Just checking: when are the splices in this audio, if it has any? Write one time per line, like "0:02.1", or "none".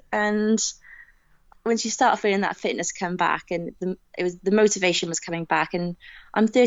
0:01.5

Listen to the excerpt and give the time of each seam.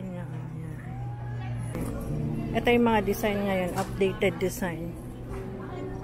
0:01.8

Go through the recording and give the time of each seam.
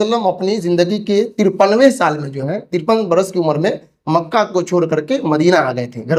none

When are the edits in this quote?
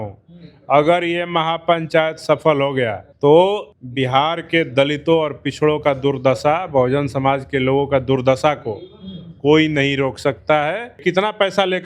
0:03.0
0:03.8
0:11.0

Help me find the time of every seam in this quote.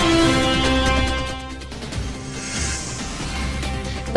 none

